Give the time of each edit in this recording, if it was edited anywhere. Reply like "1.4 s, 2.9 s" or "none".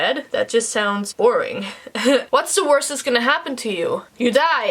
1.1 s, 2.3 s